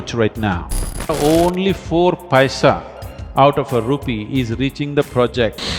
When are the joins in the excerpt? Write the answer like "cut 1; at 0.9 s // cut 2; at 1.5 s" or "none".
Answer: cut 1; at 1.1 s